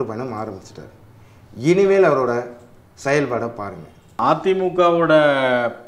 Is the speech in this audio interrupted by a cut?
yes; 1 cut; at 4.2 s

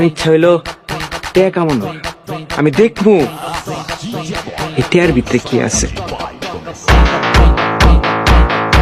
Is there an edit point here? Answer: no; 0 cuts

